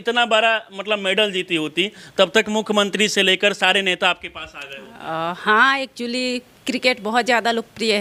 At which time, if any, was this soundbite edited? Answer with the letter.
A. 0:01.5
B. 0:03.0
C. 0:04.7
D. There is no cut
D